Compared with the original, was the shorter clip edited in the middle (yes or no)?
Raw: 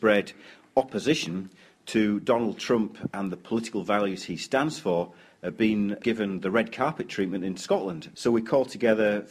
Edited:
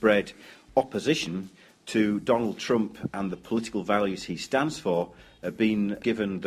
no